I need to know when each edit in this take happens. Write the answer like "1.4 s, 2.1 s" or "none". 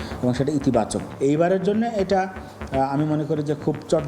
1.0 s